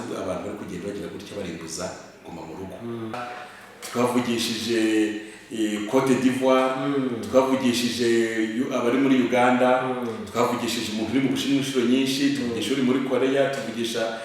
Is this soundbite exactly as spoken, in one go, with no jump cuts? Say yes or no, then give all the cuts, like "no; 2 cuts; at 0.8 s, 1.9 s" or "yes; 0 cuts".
no; 1 cut; at 3.3 s